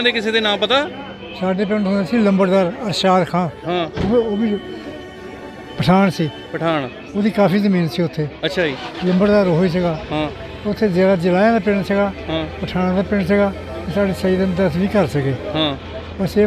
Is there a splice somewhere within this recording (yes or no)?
no